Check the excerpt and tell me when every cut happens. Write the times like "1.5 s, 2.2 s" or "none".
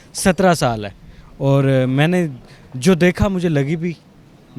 none